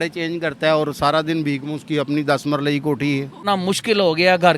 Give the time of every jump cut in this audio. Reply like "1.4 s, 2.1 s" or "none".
3.4 s